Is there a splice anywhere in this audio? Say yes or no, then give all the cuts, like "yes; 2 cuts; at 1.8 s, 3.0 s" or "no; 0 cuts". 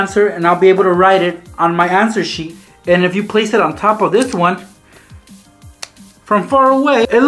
yes; 1 cut; at 2.5 s